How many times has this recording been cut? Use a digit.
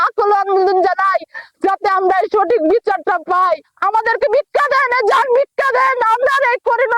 1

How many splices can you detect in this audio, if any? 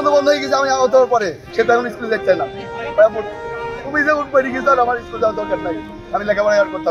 1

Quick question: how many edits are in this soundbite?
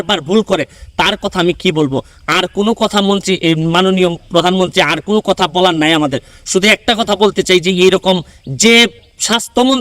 0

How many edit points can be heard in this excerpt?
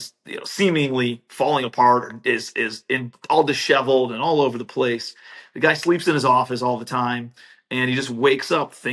0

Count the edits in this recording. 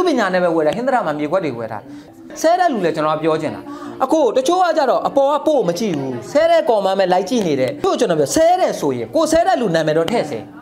2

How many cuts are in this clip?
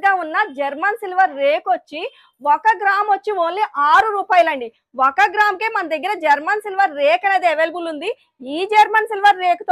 0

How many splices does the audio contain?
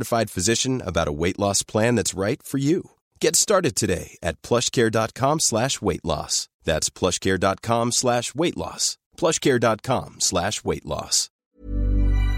1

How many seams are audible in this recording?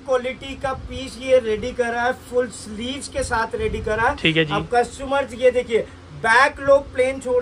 0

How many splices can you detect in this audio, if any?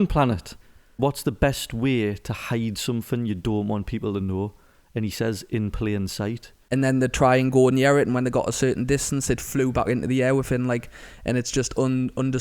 2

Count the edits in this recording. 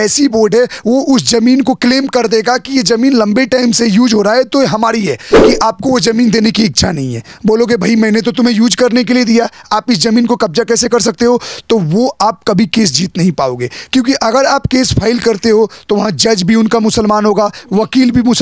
1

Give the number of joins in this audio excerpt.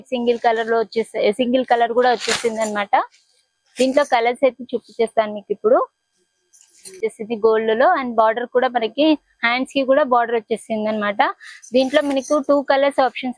1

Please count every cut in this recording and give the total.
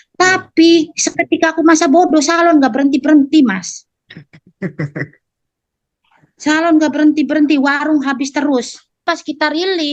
1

